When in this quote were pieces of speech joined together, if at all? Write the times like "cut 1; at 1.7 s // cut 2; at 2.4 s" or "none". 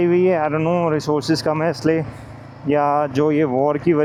none